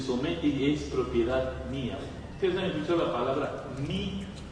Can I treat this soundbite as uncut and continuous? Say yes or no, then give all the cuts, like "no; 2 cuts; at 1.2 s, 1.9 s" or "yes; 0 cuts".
no; 1 cut; at 1.1 s